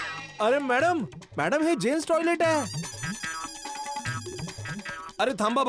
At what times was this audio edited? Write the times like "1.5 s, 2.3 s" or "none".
none